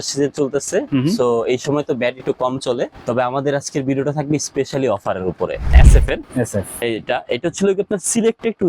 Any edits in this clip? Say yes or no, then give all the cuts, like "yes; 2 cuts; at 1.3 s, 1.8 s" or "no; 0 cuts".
yes; 2 cuts; at 3.1 s, 5.7 s